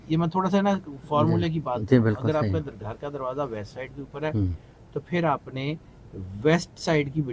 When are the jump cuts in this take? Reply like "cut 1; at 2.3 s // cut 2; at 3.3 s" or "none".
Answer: none